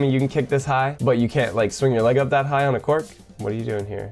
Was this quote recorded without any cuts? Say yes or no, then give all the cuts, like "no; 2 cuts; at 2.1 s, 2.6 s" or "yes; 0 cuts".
no; 1 cut; at 0.9 s